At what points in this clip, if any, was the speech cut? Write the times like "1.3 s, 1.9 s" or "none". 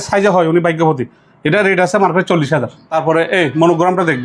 2.8 s

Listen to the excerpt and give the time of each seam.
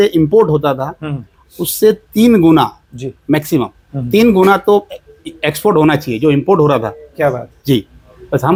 none

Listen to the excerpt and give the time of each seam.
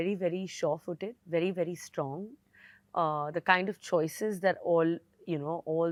none

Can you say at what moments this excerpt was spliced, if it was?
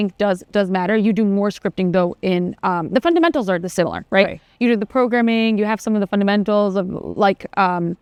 none

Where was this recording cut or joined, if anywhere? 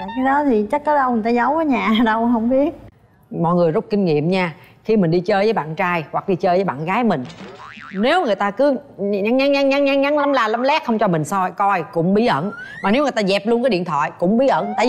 2.9 s

